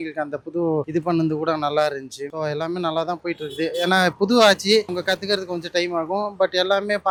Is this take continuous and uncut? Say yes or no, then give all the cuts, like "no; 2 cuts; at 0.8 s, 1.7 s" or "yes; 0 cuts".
yes; 0 cuts